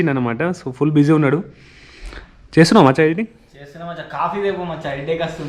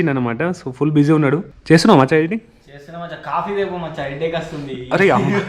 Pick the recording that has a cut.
second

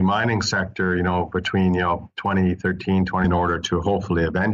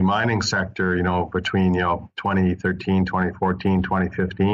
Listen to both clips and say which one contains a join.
second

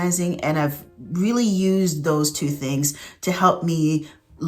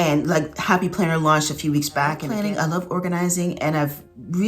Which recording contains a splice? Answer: second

